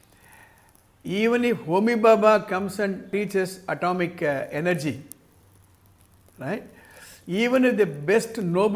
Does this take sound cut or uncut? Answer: cut